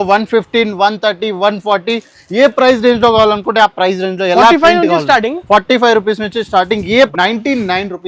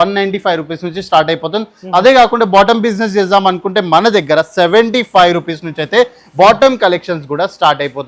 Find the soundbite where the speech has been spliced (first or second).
first